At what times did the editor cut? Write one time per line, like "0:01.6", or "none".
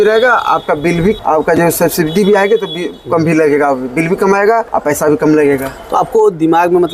0:01.2
0:04.7